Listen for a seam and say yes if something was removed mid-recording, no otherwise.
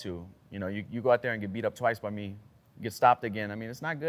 no